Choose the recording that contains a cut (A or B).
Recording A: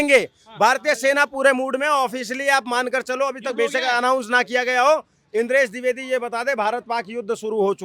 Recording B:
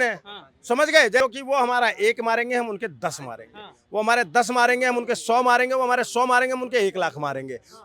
B